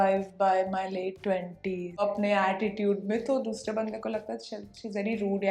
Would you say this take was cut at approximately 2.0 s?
yes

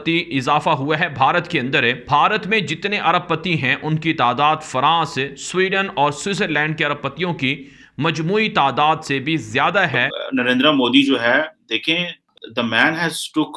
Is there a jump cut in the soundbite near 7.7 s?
no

